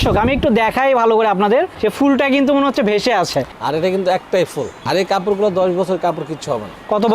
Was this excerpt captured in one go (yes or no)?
no